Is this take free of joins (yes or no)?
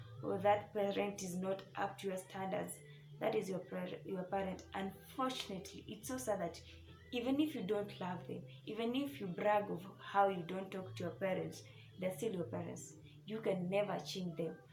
yes